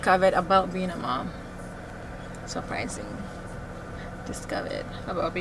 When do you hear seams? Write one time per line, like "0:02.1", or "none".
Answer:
none